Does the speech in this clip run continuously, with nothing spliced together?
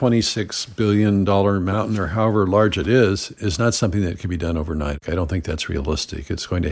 no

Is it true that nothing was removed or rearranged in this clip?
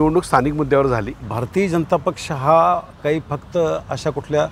no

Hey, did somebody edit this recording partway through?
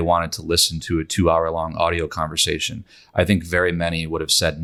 no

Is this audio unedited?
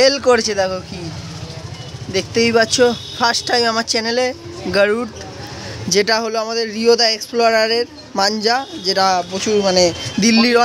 yes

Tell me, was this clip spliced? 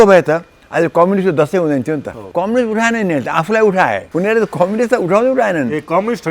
yes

